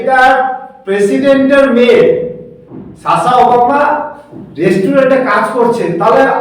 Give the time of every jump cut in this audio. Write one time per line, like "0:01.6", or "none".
none